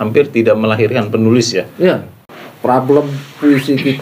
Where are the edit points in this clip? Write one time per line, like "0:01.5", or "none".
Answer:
0:02.1